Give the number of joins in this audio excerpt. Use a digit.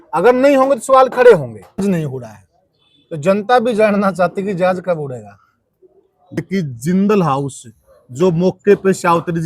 2